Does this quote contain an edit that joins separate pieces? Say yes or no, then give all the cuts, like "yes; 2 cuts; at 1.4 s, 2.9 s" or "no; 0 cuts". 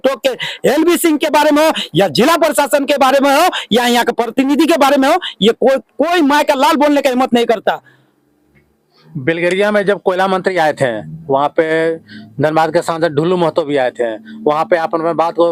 no; 0 cuts